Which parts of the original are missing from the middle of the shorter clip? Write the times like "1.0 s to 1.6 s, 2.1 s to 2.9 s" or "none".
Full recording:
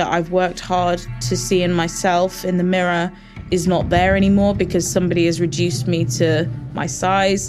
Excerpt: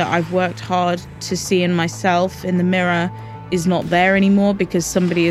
none